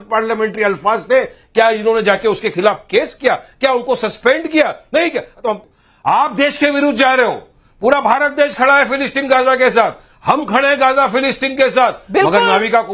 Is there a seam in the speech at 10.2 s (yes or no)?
no